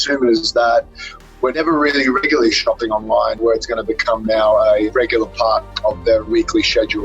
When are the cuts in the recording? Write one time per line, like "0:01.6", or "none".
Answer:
0:01.5
0:03.4
0:04.9
0:06.3